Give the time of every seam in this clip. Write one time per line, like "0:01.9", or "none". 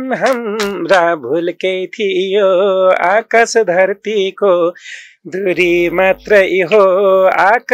none